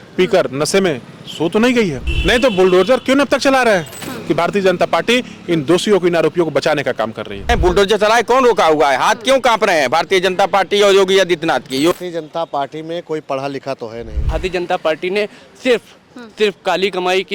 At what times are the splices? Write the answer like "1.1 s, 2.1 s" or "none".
2.1 s, 4.1 s, 7.5 s, 11.9 s, 14.3 s